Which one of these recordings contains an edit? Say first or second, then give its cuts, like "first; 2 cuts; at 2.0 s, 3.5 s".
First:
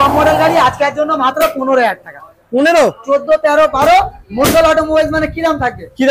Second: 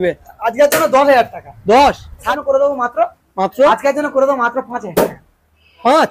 second; 1 cut; at 2.3 s